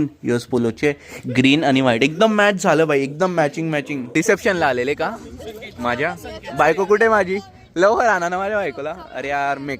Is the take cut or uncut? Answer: cut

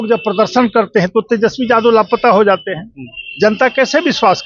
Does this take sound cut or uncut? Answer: uncut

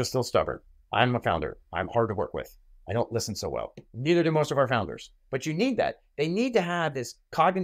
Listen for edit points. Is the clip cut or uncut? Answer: uncut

